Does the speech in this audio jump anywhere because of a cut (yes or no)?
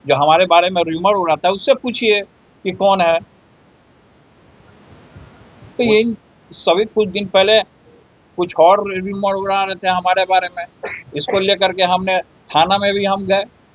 no